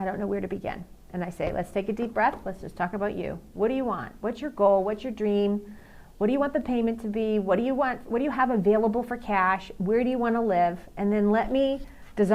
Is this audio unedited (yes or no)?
no